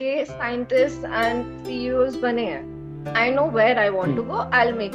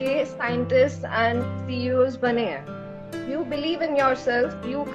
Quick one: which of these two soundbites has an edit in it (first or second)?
second